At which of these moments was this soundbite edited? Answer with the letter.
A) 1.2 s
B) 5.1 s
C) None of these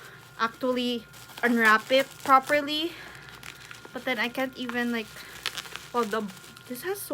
A